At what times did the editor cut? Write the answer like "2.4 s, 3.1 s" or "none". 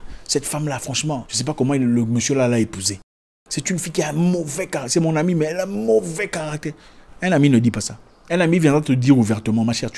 1.3 s